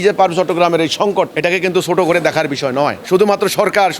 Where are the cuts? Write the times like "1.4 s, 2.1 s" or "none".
1.3 s, 3.0 s